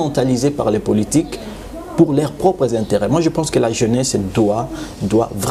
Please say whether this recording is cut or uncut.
uncut